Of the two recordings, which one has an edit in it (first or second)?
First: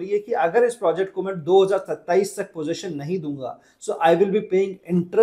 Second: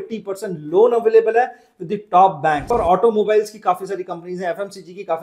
second